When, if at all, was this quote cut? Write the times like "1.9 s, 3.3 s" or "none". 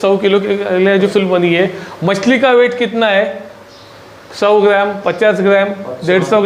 1.1 s